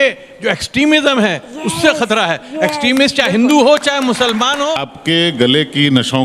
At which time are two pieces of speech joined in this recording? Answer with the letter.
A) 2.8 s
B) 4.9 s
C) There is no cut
B